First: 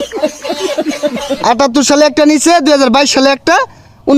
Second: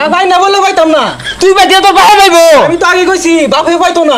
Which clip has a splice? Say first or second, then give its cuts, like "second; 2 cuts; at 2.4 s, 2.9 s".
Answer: first; 1 cut; at 1.0 s